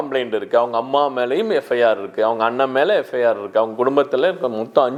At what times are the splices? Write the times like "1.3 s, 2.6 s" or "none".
none